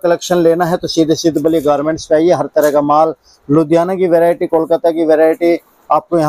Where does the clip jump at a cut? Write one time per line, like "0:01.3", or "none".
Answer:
none

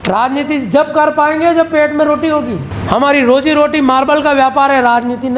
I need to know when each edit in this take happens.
0:02.7

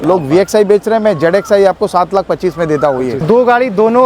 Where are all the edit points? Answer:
0:03.2

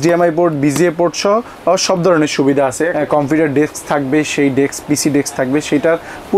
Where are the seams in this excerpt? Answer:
0:02.9

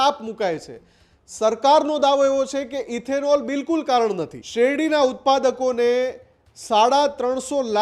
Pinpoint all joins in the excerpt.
0:04.4

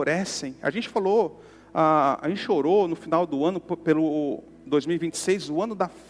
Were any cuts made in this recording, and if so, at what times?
none

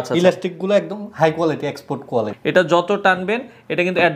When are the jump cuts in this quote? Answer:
0:02.3

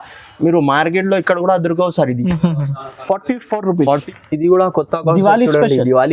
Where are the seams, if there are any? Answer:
0:03.9

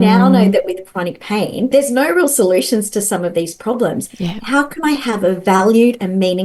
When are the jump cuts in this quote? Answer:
0:01.7

